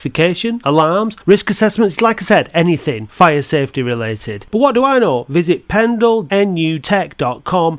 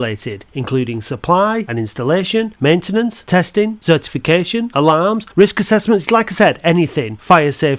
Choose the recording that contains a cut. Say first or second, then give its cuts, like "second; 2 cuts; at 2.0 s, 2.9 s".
first; 1 cut; at 6.5 s